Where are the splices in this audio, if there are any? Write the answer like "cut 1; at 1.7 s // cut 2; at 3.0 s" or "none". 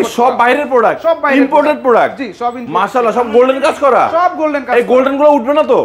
none